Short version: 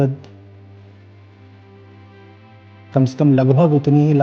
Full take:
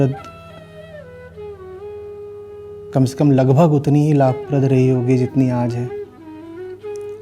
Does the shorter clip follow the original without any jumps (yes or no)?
yes